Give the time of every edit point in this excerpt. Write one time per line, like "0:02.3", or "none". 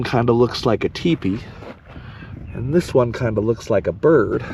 none